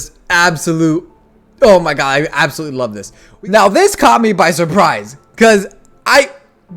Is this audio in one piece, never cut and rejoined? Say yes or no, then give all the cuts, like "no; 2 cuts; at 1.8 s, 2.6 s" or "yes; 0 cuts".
no; 1 cut; at 3.2 s